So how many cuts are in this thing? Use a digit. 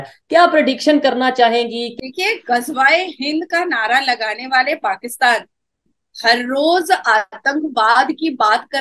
1